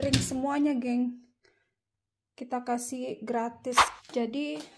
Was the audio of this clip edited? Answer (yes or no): yes